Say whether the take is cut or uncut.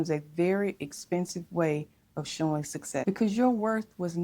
cut